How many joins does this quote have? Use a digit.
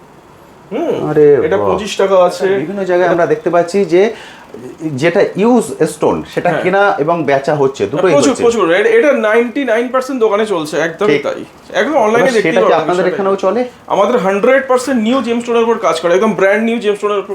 1